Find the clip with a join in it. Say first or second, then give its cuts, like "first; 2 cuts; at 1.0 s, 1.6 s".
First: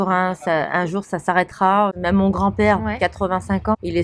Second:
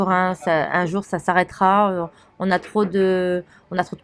first; 1 cut; at 2.0 s